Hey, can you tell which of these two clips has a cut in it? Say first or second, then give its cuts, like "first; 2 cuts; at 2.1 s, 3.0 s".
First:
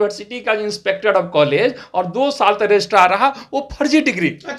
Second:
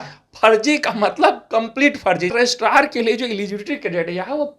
second; 1 cut; at 2.3 s